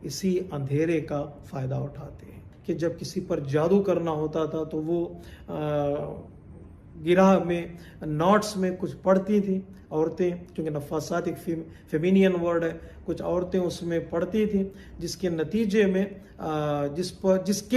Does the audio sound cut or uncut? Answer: cut